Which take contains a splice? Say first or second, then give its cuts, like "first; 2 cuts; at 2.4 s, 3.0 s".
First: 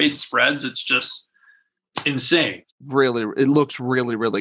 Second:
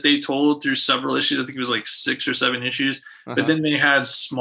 first; 1 cut; at 2.7 s